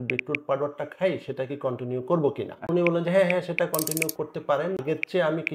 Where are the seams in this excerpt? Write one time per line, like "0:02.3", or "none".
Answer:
0:02.7
0:04.8